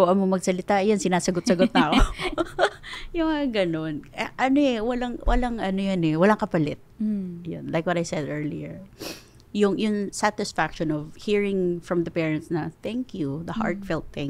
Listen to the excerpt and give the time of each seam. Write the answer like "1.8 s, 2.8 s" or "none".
none

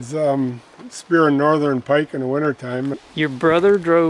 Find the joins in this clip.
3.0 s

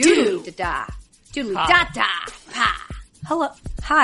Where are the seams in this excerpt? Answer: none

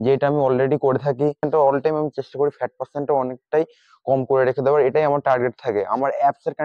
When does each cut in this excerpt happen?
1.4 s

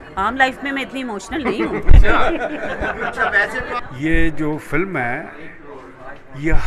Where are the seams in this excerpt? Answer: 3.8 s

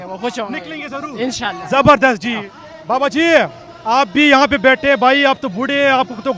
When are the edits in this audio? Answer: 2.5 s

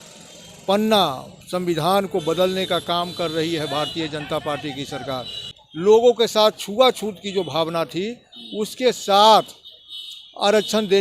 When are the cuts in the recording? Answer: 5.5 s

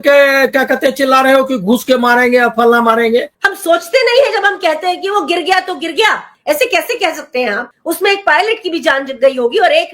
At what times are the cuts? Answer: 3.3 s

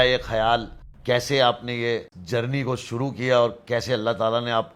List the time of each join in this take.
none

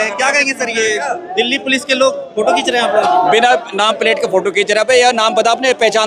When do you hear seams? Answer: none

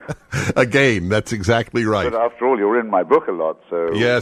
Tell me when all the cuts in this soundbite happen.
none

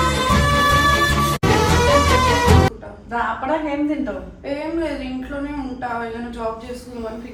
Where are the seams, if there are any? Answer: none

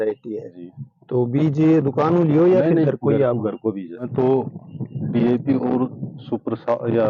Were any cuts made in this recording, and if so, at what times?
4.1 s

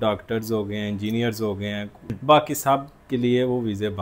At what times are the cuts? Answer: 2.1 s

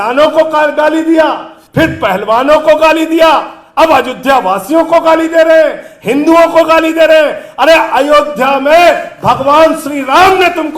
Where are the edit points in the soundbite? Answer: none

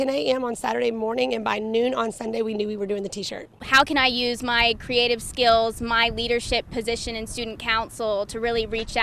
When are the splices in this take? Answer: 3.6 s

